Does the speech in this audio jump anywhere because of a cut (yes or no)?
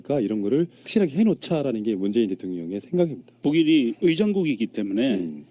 yes